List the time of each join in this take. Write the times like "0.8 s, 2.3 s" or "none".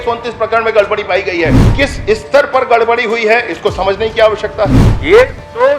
1.6 s, 4.9 s